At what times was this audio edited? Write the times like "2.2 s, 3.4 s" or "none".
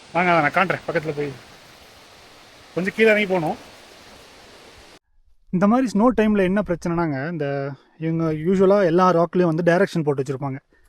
5.0 s

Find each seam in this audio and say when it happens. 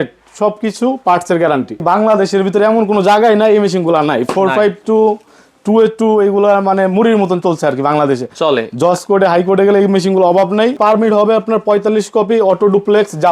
1.8 s, 10.8 s

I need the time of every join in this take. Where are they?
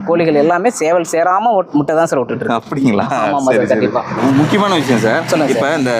4.1 s

